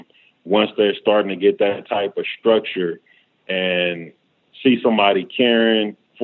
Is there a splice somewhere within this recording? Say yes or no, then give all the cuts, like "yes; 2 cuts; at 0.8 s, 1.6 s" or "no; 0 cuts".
no; 0 cuts